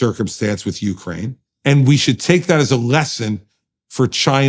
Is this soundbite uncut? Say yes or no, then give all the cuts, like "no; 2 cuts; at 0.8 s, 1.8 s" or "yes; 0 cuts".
no; 1 cut; at 1.4 s